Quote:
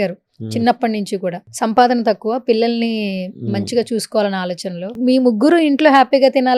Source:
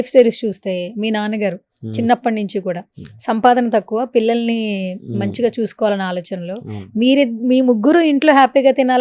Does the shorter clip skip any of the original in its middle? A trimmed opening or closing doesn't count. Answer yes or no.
yes